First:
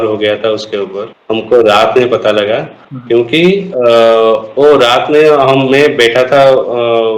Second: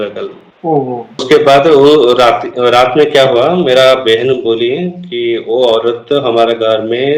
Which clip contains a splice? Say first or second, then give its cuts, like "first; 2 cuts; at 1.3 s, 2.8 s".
second; 1 cut; at 1.1 s